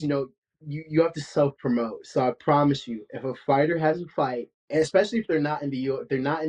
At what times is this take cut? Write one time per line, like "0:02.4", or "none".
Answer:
0:04.5